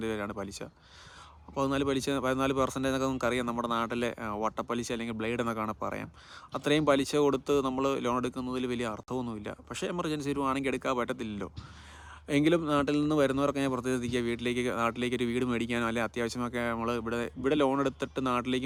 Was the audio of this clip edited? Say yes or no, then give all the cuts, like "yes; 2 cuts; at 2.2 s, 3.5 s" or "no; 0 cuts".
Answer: no; 0 cuts